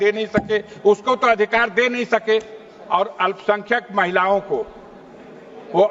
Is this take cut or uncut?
uncut